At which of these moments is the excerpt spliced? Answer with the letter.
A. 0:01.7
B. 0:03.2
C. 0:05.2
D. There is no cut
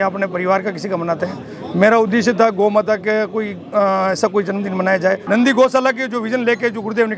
C